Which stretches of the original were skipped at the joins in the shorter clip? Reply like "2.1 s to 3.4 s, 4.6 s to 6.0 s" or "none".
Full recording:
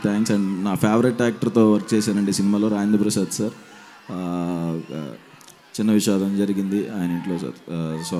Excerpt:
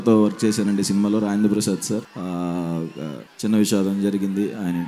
3.6 s to 4.1 s, 5.2 s to 5.6 s

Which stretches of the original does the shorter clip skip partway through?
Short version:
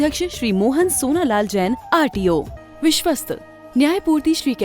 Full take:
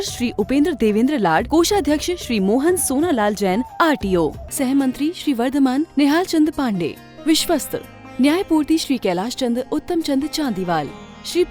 4.5 s to 7.0 s

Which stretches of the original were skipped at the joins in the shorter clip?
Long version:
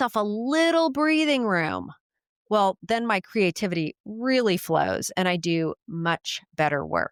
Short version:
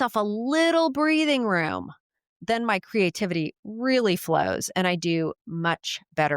2.4 s to 2.8 s

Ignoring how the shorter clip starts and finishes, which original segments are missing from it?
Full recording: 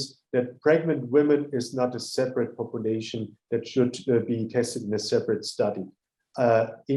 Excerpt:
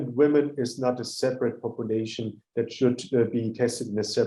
none

